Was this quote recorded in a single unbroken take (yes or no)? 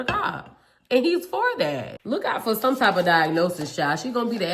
no